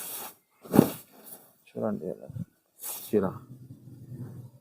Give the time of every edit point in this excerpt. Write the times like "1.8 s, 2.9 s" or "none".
3.1 s